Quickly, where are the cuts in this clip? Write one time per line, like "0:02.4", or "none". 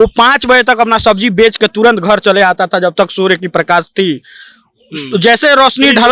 none